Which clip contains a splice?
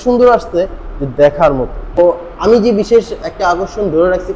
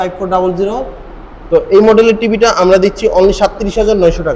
first; 1 cut; at 2.0 s

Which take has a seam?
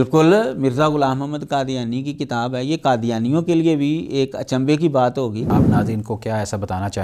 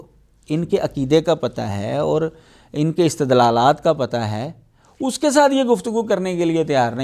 first; 1 cut; at 5.5 s

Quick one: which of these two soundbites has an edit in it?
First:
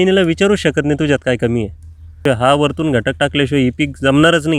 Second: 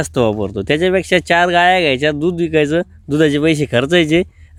first; 1 cut; at 2.2 s

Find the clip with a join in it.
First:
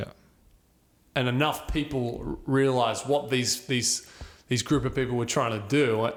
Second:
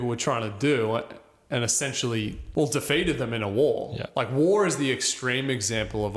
second; 1 cut; at 2.4 s

